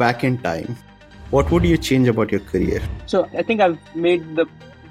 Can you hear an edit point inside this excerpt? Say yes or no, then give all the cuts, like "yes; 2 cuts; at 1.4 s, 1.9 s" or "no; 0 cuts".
yes; 1 cut; at 3.3 s